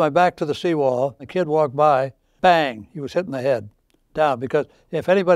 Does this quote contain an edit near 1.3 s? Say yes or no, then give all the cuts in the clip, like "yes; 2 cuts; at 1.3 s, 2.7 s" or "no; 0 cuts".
yes; 2 cuts; at 1.3 s, 2.2 s